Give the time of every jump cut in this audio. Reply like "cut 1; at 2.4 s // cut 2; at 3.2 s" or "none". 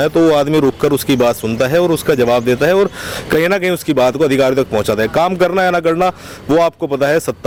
none